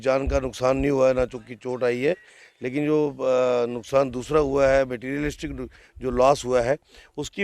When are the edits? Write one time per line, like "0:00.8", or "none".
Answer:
none